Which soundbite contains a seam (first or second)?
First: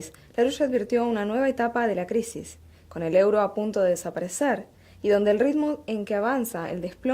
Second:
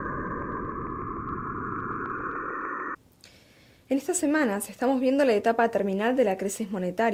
first